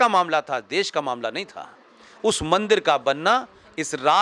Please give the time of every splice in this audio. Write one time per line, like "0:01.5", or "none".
none